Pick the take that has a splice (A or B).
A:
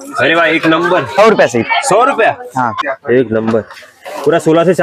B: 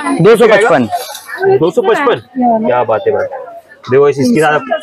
A